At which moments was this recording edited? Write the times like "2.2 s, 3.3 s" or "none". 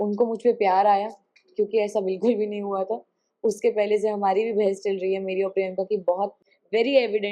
6.4 s